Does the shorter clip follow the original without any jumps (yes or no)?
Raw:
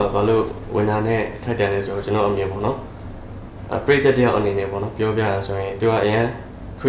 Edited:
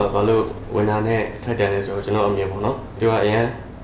no